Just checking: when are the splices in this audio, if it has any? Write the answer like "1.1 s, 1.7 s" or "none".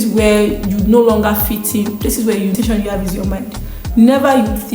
2.5 s